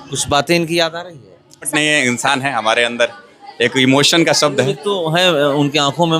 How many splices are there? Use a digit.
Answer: 1